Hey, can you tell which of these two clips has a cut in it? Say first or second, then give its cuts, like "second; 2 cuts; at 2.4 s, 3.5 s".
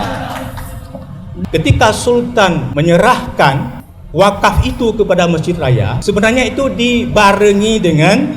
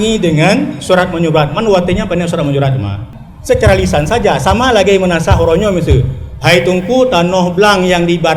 first; 3 cuts; at 1.4 s, 2.7 s, 5.9 s